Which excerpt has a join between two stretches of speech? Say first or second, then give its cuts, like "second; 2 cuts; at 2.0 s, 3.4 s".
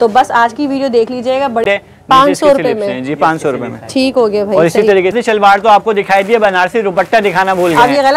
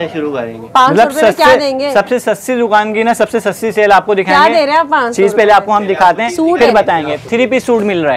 first; 2 cuts; at 1.6 s, 5.1 s